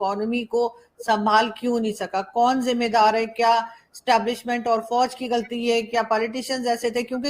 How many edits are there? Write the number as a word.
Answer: zero